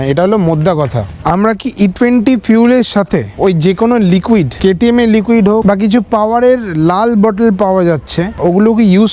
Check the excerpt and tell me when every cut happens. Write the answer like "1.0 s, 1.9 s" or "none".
1.2 s, 5.6 s, 8.3 s